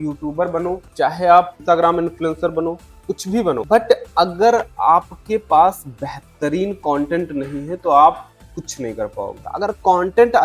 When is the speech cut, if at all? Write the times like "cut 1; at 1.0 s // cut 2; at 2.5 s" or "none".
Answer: cut 1; at 0.9 s // cut 2; at 1.6 s // cut 3; at 3.6 s // cut 4; at 9.4 s

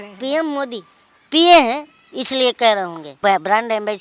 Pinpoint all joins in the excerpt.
cut 1; at 3.1 s

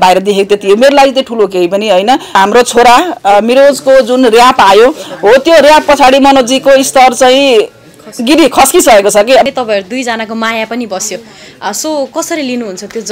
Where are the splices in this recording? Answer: cut 1; at 2.4 s // cut 2; at 9.5 s

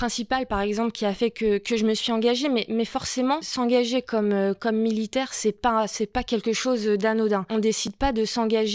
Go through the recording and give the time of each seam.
cut 1; at 3.5 s // cut 2; at 7.5 s

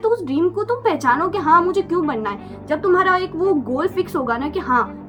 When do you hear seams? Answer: none

